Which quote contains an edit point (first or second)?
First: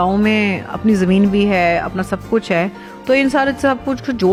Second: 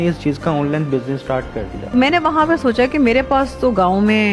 second